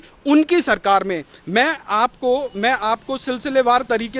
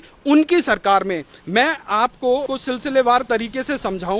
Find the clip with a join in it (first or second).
second